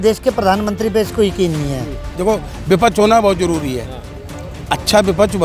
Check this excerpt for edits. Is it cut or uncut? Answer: cut